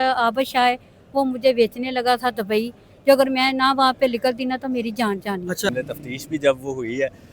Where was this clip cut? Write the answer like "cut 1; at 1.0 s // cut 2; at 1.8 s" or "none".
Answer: cut 1; at 5.7 s